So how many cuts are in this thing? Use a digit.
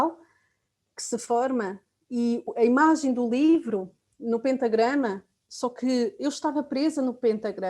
1